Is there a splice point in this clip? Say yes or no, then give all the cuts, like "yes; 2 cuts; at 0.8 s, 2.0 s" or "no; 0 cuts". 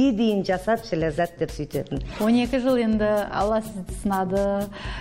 yes; 1 cut; at 2.1 s